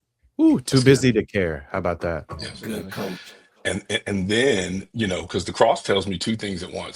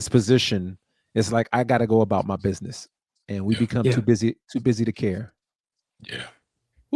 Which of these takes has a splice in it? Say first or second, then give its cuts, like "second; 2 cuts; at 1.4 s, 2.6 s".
first; 1 cut; at 3.0 s